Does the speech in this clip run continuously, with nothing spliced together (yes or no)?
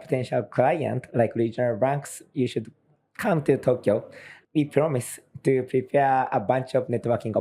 no